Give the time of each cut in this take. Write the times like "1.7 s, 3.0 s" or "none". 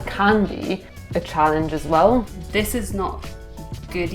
0.9 s, 2.4 s